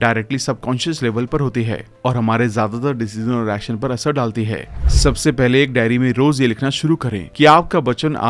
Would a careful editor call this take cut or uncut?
cut